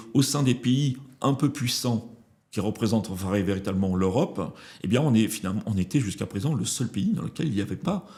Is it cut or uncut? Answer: uncut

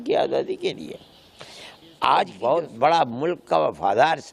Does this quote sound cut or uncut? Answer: cut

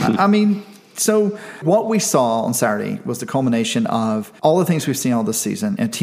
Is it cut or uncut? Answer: cut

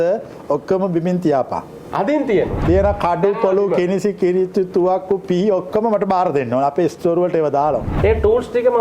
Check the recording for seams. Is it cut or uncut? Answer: cut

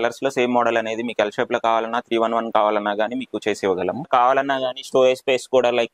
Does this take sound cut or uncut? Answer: cut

